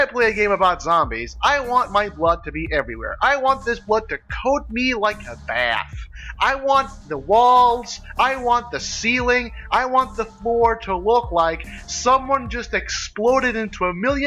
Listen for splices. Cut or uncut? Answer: uncut